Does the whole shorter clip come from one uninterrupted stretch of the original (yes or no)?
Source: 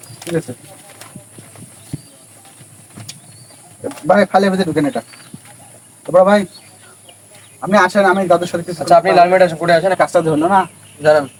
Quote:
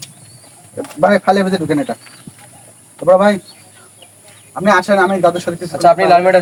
yes